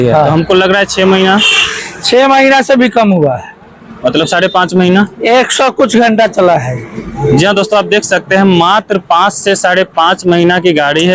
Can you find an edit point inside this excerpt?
no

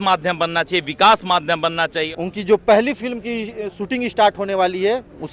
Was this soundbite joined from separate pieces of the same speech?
yes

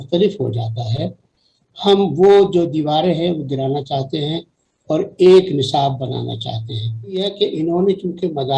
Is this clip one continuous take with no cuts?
no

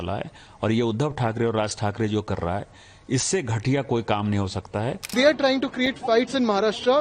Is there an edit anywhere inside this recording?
yes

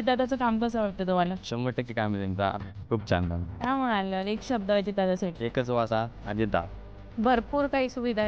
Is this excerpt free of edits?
no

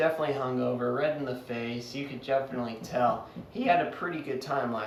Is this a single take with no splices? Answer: yes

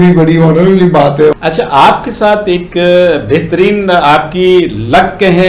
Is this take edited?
yes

